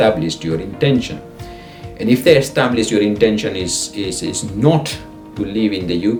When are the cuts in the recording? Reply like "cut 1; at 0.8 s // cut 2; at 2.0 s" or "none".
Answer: none